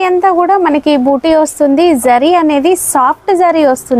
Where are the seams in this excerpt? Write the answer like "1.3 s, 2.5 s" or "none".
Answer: none